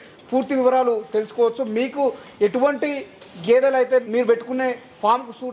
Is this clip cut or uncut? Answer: cut